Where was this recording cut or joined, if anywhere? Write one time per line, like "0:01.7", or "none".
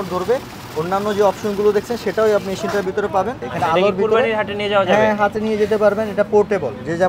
0:03.4

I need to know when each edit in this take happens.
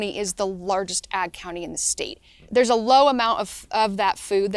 0:02.3

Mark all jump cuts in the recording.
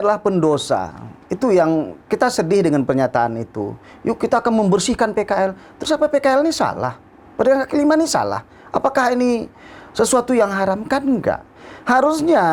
none

